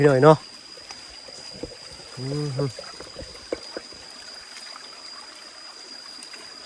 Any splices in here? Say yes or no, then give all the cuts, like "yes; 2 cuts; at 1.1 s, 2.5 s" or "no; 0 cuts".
no; 0 cuts